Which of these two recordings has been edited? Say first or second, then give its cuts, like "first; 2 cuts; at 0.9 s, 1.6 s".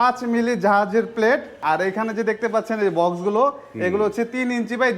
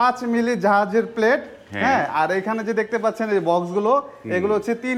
first; 1 cut; at 1.6 s